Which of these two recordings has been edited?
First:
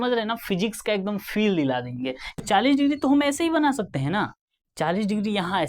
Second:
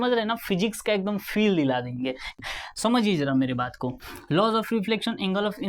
first; 1 cut; at 2.4 s

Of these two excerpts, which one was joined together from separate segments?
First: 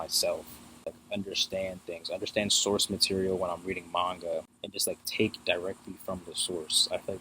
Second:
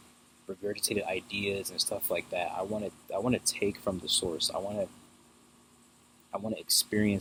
first; 2 cuts; at 0.9 s, 4.6 s

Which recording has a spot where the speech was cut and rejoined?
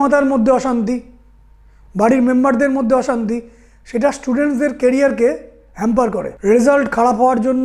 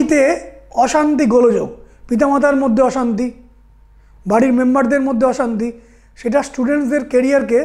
first; 1 cut; at 6.3 s

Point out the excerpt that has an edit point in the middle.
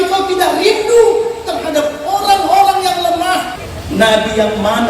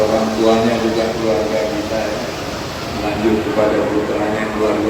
first; 1 cut; at 3.5 s

